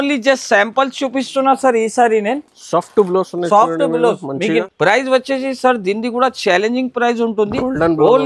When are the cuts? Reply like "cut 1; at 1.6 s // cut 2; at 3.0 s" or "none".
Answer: cut 1; at 4.6 s